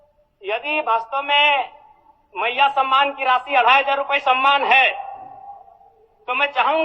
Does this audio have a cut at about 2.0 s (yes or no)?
no